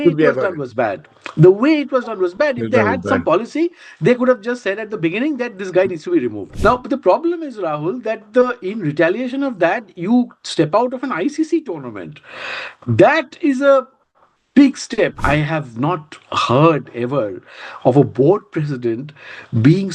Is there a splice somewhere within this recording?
yes; 2 cuts; at 6.4 s, 15.2 s

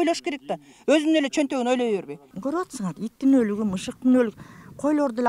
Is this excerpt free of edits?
no; 1 cut; at 2.3 s

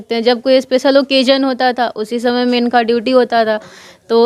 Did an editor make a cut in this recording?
no; 0 cuts

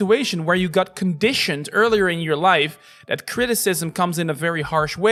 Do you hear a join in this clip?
no; 0 cuts

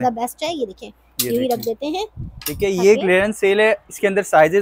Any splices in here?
no; 0 cuts

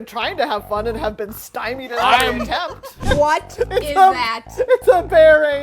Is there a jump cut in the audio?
yes; 1 cut; at 2.9 s

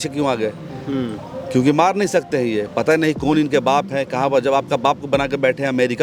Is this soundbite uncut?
yes; 0 cuts

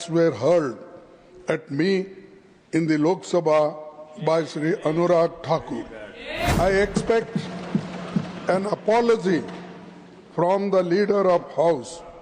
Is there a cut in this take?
yes; 1 cut; at 6.5 s

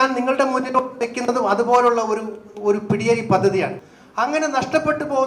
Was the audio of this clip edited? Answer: yes; 1 cut; at 3.8 s

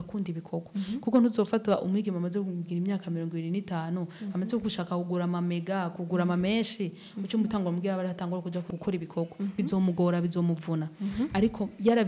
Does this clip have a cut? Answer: yes; 1 cut; at 8.7 s

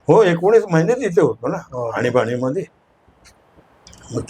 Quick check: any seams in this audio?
no; 0 cuts

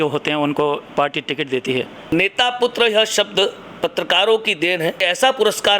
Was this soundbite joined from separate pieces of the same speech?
yes; 3 cuts; at 2.1 s, 3.6 s, 5.0 s

